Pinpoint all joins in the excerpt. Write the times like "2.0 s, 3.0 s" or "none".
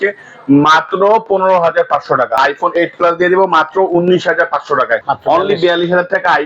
2.4 s, 5.1 s